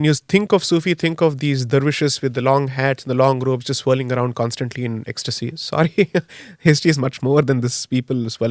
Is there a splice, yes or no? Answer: no